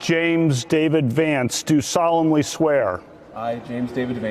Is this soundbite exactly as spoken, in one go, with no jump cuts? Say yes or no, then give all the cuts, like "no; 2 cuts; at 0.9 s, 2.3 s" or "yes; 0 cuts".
yes; 0 cuts